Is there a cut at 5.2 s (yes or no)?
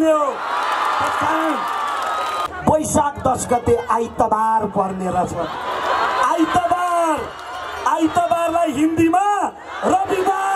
no